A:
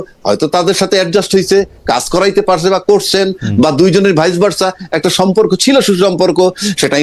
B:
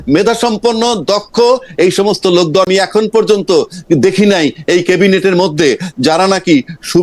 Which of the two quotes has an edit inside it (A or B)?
B